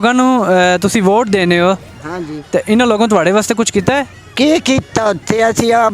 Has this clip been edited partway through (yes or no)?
no